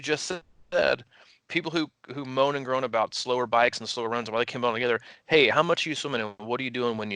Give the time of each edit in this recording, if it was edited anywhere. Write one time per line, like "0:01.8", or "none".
none